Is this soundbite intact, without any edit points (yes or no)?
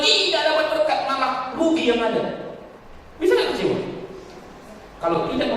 yes